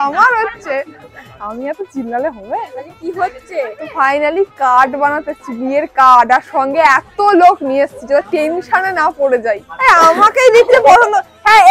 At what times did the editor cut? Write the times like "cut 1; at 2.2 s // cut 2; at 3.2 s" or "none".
cut 1; at 9.7 s